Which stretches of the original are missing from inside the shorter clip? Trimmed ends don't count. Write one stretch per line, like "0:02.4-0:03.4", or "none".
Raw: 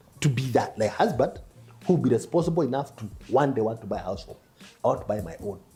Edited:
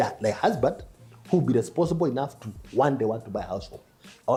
none